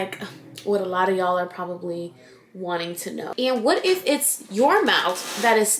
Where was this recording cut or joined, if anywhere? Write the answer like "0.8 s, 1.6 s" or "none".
3.3 s